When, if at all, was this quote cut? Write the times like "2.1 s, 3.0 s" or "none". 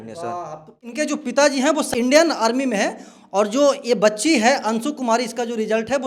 0.8 s, 1.9 s

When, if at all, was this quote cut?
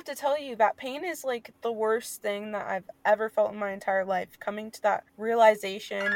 1.5 s, 2.9 s, 5.1 s

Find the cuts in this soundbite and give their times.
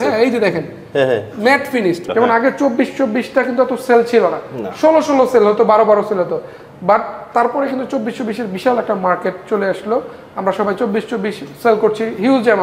2.1 s

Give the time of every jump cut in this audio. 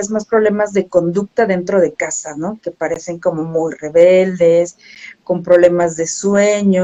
none

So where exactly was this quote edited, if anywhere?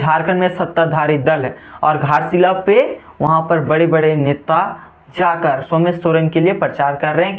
none

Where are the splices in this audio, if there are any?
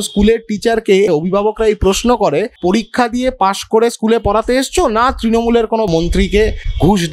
1.1 s, 2.6 s, 5.9 s

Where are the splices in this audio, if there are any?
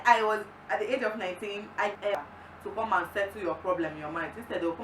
2.0 s

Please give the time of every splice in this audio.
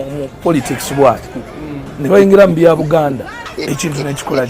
3.4 s

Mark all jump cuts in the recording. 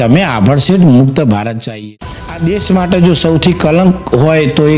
1.8 s

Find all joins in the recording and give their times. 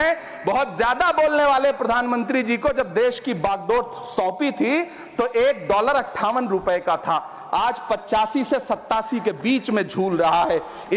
none

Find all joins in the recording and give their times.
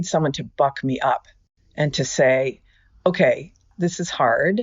3.7 s

